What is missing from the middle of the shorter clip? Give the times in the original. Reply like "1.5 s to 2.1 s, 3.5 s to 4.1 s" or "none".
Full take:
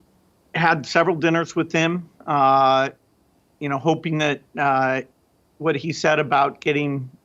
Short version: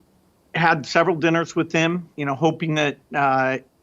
2.1 s to 3.5 s